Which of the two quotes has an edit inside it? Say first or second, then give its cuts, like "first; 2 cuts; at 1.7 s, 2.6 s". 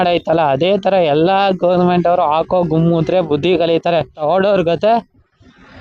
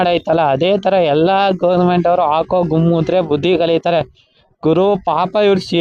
first; 1 cut; at 4.2 s